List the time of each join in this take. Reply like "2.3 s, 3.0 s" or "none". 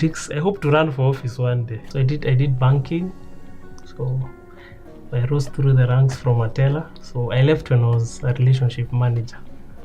1.8 s